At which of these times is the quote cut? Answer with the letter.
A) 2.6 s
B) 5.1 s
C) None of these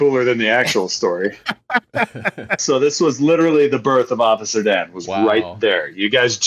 A